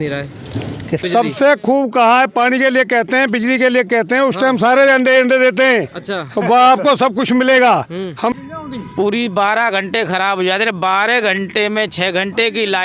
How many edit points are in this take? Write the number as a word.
two